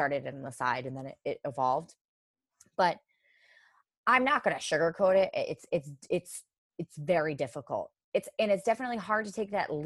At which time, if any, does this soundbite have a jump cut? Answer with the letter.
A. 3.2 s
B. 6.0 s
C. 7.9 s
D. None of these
C